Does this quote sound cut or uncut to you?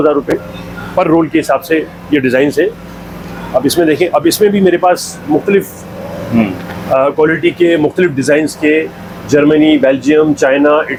uncut